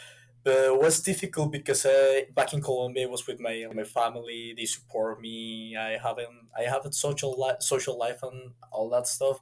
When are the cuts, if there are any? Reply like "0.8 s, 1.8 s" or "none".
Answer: none